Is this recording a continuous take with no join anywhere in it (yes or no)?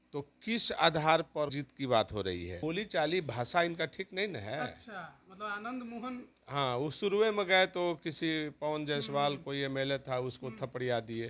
no